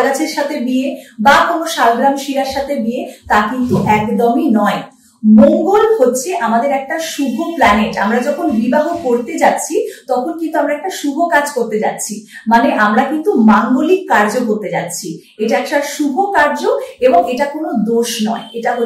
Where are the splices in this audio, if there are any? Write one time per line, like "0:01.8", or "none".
none

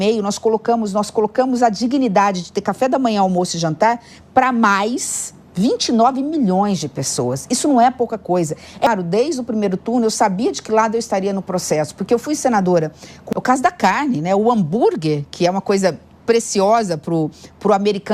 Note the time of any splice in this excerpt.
0:08.9
0:13.2

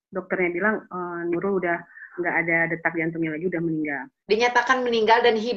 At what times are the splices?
0:04.1

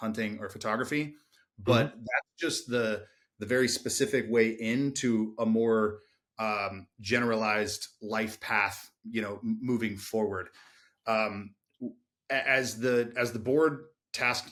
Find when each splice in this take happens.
none

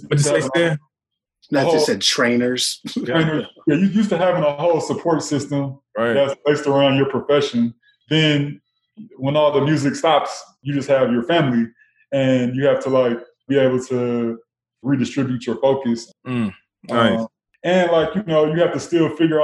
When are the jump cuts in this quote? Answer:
0:07.9
0:10.6
0:13.4
0:14.8
0:16.1
0:17.5

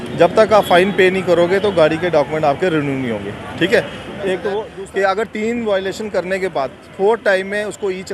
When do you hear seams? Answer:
0:04.6

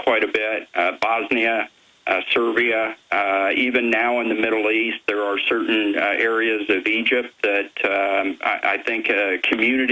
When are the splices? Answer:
0:06.9

